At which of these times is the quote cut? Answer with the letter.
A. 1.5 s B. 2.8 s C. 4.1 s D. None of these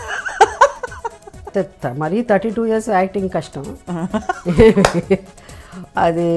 A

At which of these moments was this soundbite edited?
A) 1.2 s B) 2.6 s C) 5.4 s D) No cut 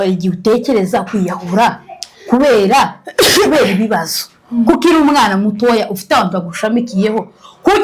D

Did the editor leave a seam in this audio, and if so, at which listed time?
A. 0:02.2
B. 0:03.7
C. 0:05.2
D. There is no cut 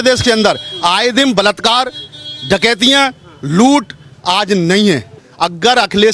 C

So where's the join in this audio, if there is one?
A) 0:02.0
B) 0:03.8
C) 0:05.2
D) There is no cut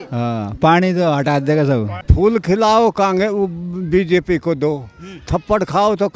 A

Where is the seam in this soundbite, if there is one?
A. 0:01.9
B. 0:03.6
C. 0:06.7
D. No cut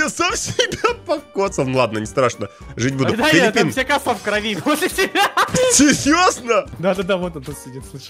C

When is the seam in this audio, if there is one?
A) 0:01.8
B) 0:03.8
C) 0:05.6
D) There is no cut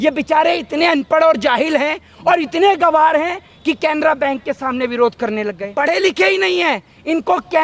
C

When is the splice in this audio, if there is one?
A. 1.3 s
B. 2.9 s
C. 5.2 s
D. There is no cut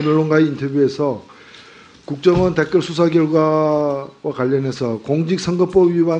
A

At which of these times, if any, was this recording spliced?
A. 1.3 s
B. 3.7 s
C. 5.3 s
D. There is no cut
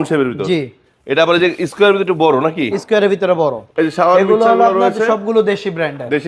B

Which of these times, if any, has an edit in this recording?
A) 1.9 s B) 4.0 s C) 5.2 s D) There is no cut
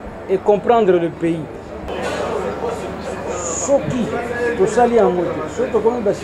A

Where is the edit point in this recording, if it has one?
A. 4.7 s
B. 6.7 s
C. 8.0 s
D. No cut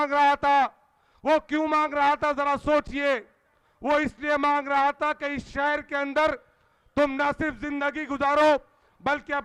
D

